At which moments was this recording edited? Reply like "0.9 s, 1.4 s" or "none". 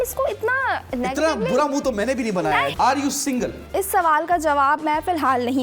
2.7 s